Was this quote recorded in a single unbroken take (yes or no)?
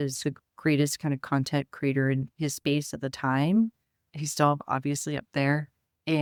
yes